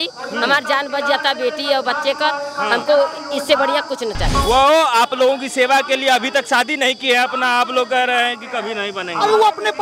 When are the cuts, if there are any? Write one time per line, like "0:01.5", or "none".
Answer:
0:04.3